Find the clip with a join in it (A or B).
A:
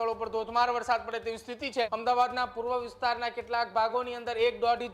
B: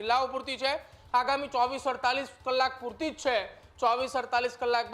A